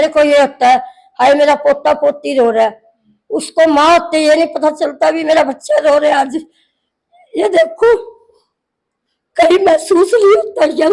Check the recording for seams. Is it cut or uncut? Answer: uncut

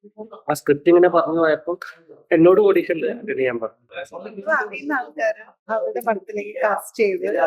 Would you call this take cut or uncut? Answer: cut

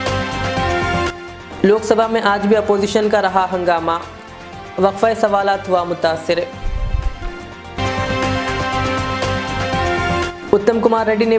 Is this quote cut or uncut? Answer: cut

